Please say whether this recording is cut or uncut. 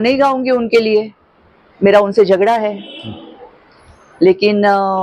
uncut